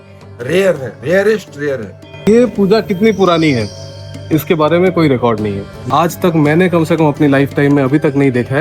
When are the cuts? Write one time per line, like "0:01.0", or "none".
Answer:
0:02.3
0:05.7